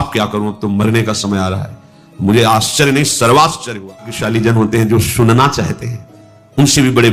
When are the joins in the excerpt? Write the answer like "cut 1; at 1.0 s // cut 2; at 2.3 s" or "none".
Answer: cut 1; at 4.2 s

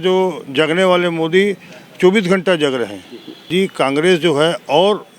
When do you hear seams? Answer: cut 1; at 3.5 s

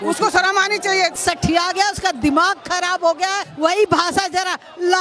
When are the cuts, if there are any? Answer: cut 1; at 1.2 s // cut 2; at 3.5 s

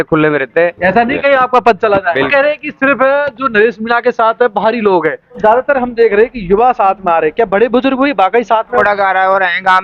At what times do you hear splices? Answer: cut 1; at 0.8 s // cut 2; at 2.3 s // cut 3; at 5.4 s // cut 4; at 8.6 s

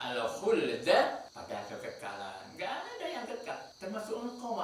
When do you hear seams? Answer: cut 1; at 1.3 s // cut 2; at 3.7 s

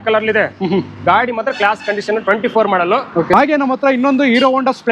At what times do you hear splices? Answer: cut 1; at 3.3 s

